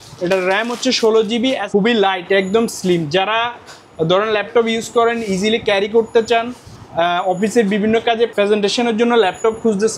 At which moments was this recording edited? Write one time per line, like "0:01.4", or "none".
0:01.6
0:08.3